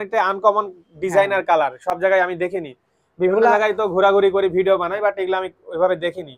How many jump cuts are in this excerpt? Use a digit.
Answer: 0